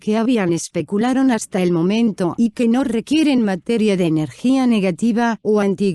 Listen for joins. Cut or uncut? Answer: uncut